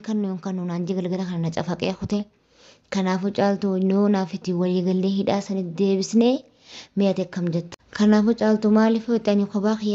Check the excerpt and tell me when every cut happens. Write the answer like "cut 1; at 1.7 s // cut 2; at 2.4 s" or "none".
cut 1; at 7.8 s